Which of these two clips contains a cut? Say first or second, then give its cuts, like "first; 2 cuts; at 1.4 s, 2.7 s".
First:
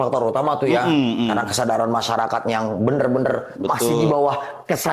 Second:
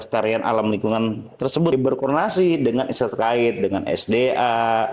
second; 1 cut; at 1.7 s